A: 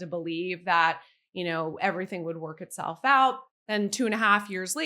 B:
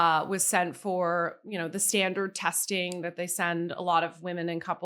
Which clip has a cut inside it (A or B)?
A